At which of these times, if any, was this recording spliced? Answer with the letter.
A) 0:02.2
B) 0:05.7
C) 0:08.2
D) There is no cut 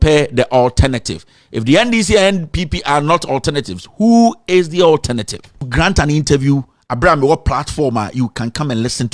B